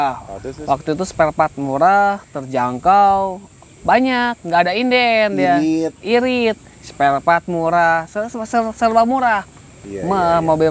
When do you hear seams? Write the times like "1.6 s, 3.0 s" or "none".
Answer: none